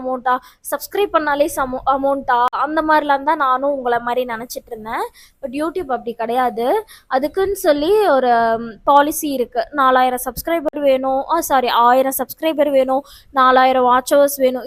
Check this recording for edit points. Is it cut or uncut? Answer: uncut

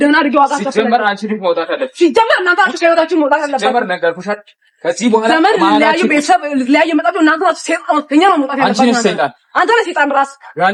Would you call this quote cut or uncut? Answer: uncut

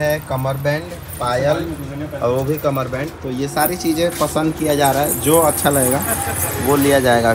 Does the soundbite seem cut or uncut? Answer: uncut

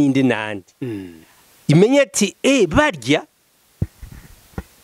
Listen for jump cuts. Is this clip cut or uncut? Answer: uncut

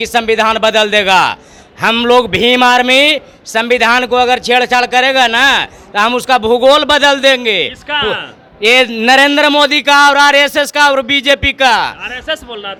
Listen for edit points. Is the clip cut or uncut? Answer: uncut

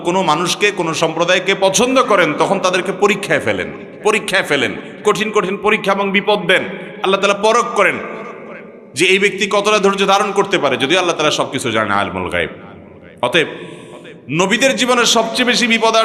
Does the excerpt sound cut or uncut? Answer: uncut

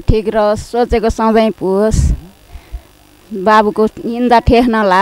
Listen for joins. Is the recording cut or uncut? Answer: uncut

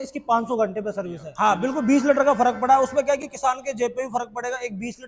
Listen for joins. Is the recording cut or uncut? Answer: cut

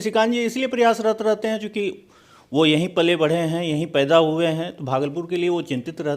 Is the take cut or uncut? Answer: uncut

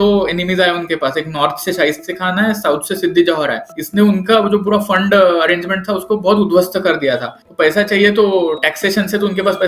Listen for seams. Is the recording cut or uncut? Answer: cut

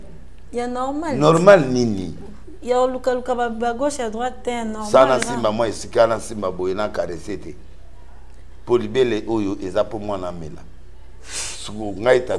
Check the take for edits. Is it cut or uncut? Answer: uncut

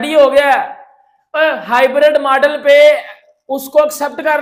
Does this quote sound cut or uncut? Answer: uncut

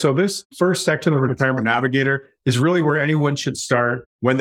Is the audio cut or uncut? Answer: uncut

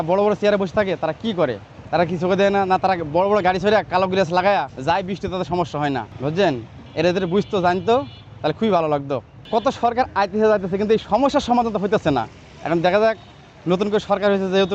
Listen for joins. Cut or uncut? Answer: cut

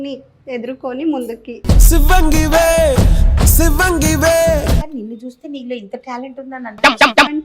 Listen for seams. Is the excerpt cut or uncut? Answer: cut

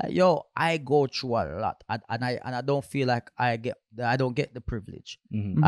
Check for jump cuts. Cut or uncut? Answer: uncut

